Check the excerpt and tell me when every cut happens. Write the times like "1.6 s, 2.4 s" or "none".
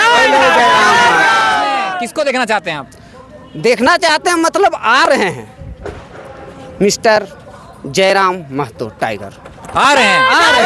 1.9 s